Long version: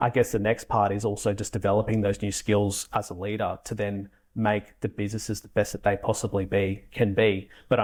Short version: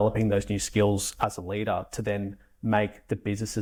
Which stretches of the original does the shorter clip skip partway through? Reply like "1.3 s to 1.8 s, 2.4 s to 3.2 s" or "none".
none